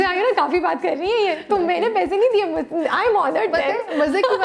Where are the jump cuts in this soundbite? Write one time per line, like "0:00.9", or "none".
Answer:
none